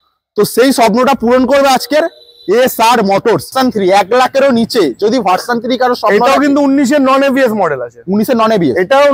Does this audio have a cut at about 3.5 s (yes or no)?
yes